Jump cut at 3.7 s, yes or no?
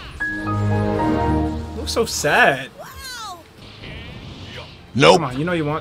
yes